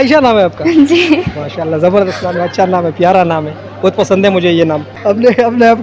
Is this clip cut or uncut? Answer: cut